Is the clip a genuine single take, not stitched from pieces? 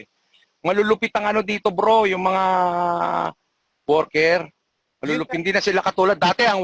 yes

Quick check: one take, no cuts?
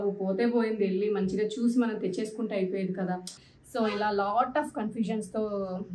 no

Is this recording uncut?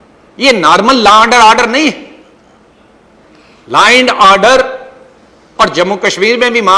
yes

